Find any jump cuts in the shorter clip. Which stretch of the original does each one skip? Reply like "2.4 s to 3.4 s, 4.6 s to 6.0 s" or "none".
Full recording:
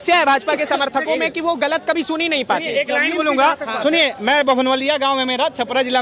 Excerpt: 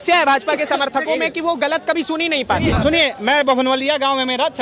2.7 s to 3.7 s